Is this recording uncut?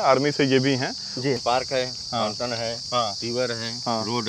no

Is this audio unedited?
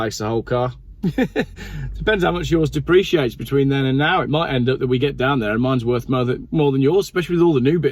no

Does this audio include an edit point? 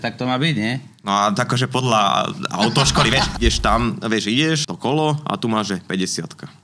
yes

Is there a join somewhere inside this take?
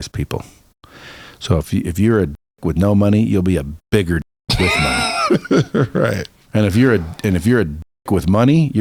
no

